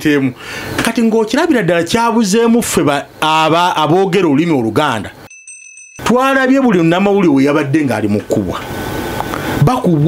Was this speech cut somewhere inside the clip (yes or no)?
yes